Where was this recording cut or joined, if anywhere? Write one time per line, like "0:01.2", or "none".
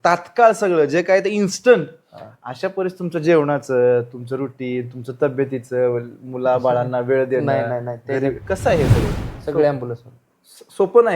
0:09.3